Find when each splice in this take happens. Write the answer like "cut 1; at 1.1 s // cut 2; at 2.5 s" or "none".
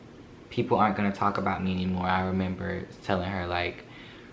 none